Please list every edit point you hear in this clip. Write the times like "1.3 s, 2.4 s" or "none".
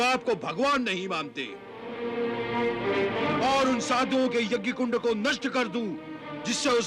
1.8 s, 3.2 s